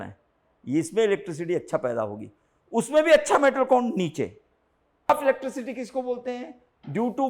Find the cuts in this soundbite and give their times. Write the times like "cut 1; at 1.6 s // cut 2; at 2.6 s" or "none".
cut 1; at 5.1 s